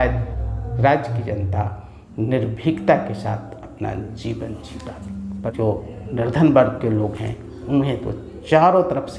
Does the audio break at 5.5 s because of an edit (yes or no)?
yes